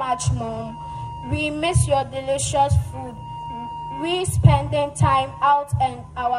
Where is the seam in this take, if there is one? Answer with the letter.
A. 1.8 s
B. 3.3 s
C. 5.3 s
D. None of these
D